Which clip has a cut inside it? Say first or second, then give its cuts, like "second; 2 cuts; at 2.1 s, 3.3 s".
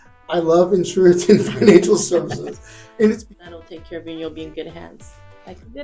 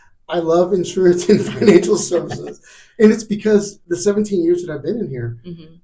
first; 1 cut; at 3.3 s